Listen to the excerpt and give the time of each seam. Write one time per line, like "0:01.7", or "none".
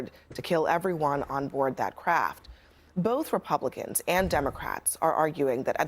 none